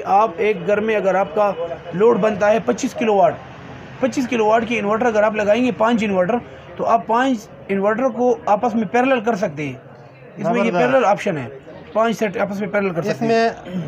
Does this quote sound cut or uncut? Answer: uncut